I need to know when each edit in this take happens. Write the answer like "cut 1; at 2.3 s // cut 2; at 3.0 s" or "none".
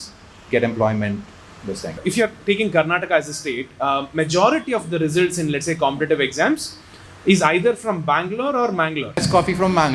cut 1; at 1.9 s // cut 2; at 9.2 s